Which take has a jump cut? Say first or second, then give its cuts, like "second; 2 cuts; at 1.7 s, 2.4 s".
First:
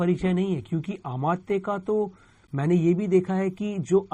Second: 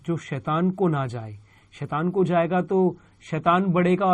first; 1 cut; at 2.5 s